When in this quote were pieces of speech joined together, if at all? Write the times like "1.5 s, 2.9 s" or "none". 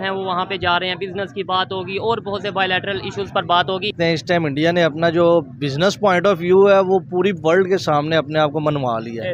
3.9 s